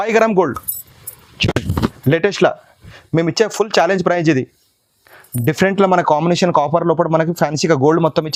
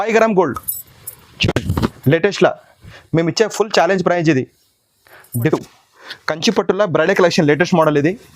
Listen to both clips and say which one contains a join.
second; 1 cut; at 5.4 s

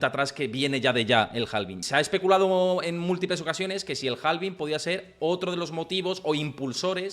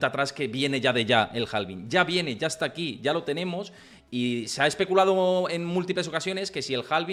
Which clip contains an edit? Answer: first; 1 cut; at 1.8 s

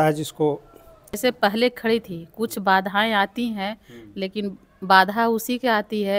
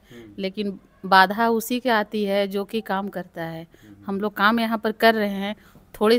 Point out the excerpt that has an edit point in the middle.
first; 1 cut; at 1.2 s

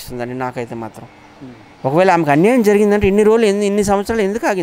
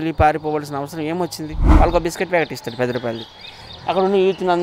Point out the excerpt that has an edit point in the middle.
second; 1 cut; at 1.6 s

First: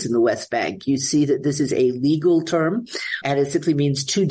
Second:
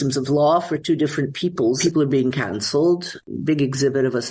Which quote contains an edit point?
second; 2 cuts; at 1.8 s, 3.2 s

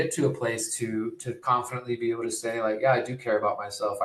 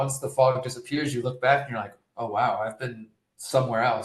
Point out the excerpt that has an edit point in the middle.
first; 1 cut; at 1.3 s

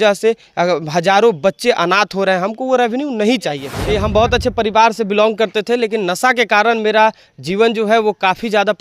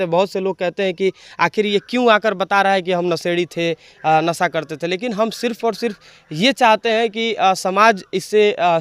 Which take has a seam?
first; 1 cut; at 3.7 s

